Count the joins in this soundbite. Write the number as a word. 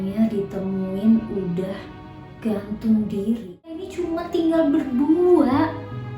one